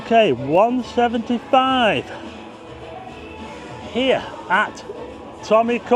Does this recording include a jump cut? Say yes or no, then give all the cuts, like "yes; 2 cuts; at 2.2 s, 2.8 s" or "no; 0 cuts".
no; 0 cuts